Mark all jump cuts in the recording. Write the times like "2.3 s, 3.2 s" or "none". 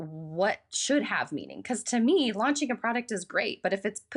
none